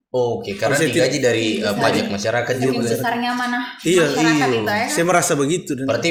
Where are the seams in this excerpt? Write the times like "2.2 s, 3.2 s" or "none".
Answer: none